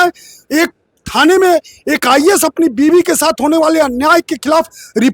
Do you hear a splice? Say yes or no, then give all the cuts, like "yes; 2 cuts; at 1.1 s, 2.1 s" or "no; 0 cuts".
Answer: no; 0 cuts